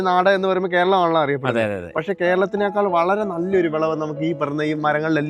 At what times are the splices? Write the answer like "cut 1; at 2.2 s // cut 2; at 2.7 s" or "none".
none